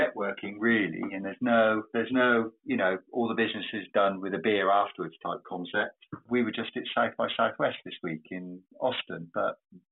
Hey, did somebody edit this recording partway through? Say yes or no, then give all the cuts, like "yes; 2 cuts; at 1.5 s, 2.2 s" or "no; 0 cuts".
no; 0 cuts